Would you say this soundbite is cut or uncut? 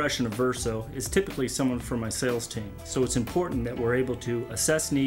uncut